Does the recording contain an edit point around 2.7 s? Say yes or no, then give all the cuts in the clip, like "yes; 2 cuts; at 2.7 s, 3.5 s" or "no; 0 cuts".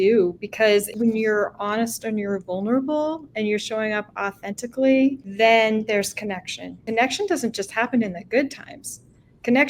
no; 3 cuts; at 0.9 s, 5.2 s, 6.8 s